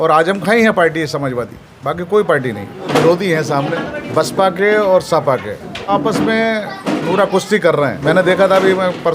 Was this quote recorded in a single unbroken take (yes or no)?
no